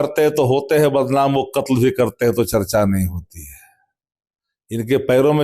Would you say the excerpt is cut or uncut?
uncut